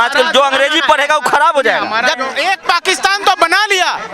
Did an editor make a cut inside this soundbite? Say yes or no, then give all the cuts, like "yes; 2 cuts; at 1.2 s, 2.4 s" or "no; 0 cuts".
yes; 1 cut; at 2.3 s